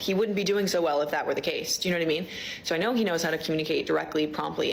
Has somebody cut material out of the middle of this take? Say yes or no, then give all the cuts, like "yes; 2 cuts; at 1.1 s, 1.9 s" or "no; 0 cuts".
yes; 1 cut; at 2.0 s